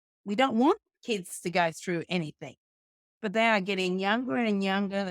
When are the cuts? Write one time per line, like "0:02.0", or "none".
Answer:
none